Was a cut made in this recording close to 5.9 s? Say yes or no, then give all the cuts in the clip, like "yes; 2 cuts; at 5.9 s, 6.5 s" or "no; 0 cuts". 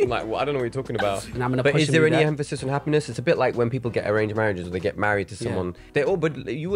yes; 2 cuts; at 1.3 s, 5.9 s